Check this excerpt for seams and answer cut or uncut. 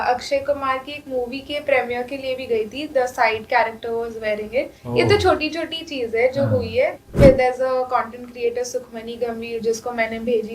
cut